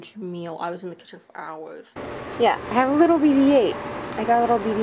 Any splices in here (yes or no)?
yes